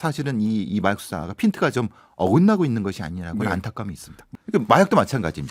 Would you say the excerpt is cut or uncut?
cut